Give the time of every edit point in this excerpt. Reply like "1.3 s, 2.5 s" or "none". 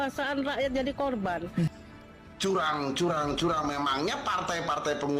1.7 s